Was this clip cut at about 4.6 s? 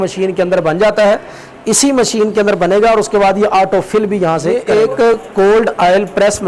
yes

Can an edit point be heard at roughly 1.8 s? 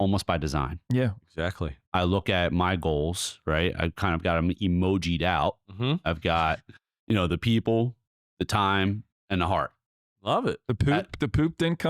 yes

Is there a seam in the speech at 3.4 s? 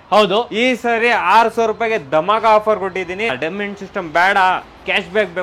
yes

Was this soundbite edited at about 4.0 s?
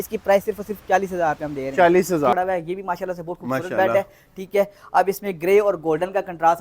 no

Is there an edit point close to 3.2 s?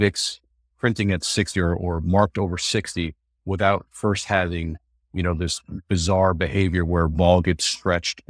no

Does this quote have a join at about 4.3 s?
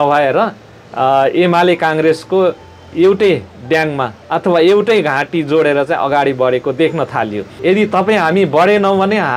no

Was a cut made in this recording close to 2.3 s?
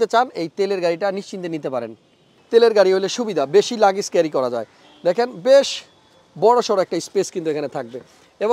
yes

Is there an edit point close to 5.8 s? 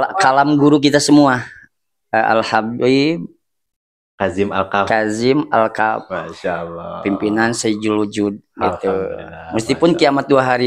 no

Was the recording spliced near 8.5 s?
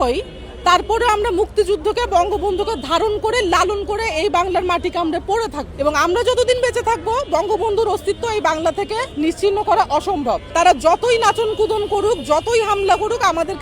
no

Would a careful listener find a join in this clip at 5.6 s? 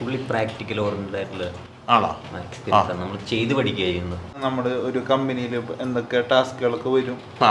no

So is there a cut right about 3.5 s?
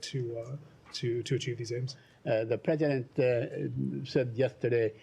no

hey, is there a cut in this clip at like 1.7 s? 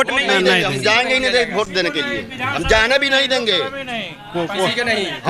no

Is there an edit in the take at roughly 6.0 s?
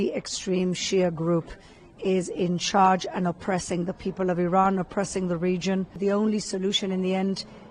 yes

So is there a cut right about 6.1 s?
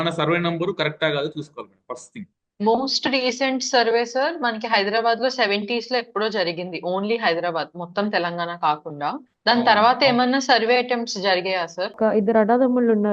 no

